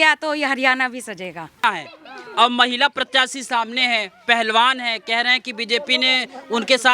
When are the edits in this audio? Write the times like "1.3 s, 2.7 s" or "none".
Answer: 1.6 s